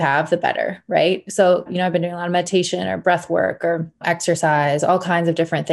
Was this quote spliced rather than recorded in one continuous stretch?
yes; 2 cuts; at 1.7 s, 4.0 s

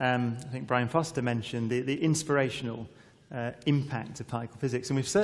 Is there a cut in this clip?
yes; 1 cut; at 2.8 s

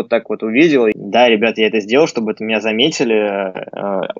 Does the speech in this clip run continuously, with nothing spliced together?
no; 1 cut; at 0.9 s

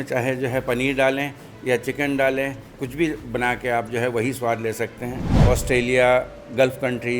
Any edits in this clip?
yes; 2 cuts; at 2.7 s, 5.4 s

